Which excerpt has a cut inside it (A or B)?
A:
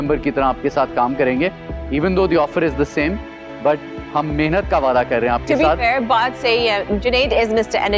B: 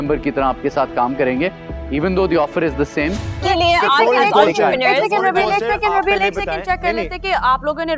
B